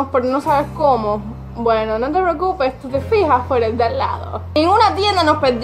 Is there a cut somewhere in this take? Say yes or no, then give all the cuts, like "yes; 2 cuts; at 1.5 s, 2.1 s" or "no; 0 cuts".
yes; 1 cut; at 4.6 s